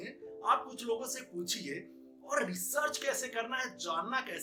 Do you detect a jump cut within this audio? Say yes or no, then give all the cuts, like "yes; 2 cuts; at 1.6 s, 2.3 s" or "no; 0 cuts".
no; 0 cuts